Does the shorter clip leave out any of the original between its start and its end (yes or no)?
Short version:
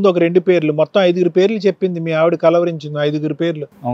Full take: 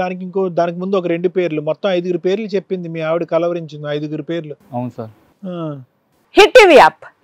no